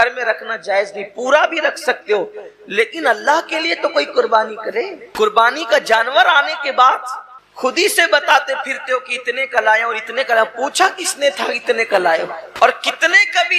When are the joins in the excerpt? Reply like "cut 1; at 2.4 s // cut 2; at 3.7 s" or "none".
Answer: cut 1; at 5.0 s // cut 2; at 12.4 s

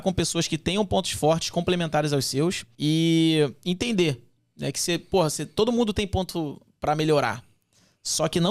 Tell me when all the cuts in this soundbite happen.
cut 1; at 2.7 s

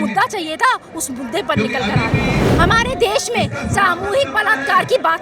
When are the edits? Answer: cut 1; at 2.4 s

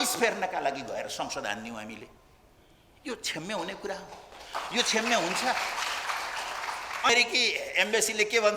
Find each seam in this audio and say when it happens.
cut 1; at 7.1 s

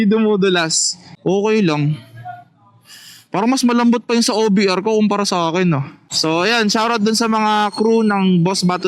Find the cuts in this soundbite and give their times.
cut 1; at 1.1 s // cut 2; at 6.1 s

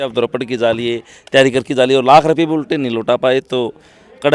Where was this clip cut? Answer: none

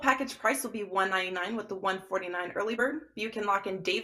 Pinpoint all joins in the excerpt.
cut 1; at 2.7 s

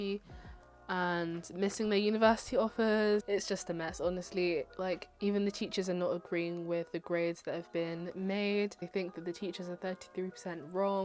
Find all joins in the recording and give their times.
cut 1; at 3.2 s // cut 2; at 8.8 s

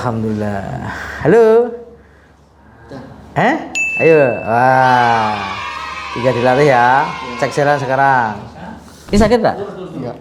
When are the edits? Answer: cut 1; at 9.1 s

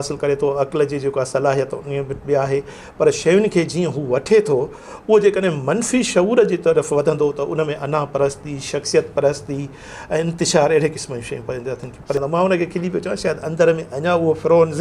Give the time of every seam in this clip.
cut 1; at 12.2 s

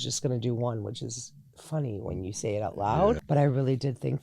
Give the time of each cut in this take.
cut 1; at 3.2 s

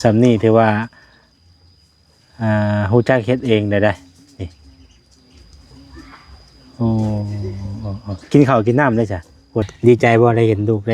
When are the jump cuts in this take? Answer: cut 1; at 9.7 s

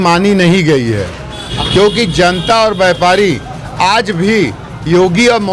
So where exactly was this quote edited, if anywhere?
cut 1; at 1.5 s

